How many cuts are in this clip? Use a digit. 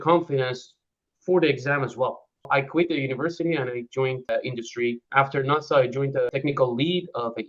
3